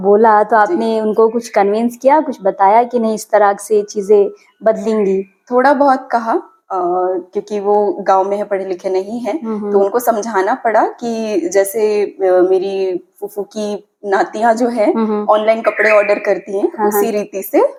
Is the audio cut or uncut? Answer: uncut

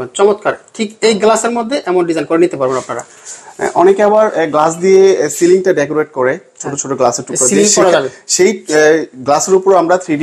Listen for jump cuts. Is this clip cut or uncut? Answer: uncut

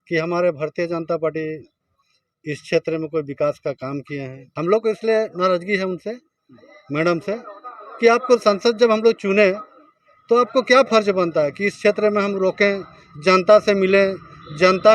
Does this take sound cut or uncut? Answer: cut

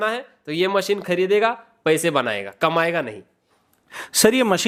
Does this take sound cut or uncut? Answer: uncut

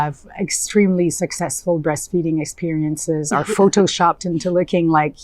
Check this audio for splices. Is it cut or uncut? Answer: uncut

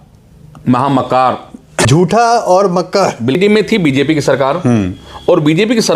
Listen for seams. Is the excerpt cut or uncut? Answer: cut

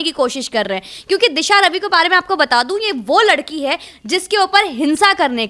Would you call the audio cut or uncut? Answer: uncut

